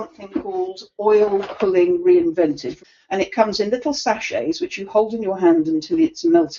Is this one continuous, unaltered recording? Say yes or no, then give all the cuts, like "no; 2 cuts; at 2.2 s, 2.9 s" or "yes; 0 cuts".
no; 1 cut; at 2.7 s